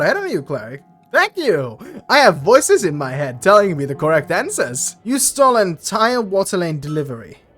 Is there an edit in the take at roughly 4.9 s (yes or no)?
yes